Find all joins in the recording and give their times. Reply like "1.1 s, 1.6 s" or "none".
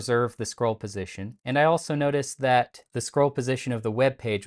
none